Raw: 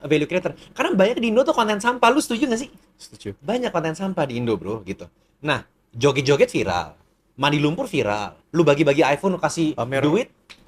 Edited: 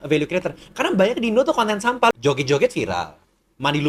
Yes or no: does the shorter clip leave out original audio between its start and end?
yes